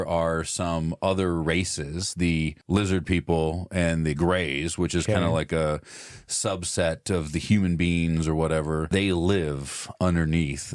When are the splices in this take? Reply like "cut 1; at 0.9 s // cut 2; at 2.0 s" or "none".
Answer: cut 1; at 2.6 s // cut 2; at 8.9 s